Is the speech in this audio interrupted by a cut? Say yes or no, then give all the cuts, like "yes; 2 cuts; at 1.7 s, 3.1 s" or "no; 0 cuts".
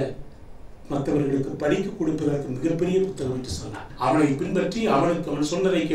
yes; 1 cut; at 3.9 s